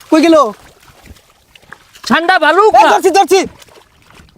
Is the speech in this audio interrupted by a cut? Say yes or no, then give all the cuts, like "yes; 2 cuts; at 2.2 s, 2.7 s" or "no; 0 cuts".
no; 0 cuts